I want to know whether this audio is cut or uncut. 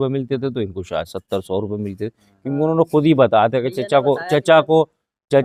uncut